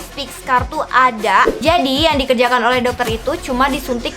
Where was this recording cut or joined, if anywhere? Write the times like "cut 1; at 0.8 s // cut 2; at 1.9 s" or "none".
cut 1; at 1.6 s